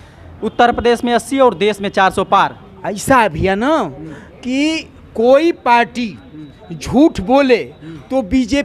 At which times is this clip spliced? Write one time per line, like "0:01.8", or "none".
none